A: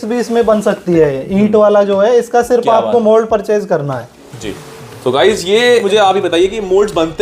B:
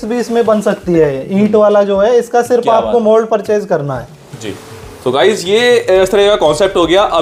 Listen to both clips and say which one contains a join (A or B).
A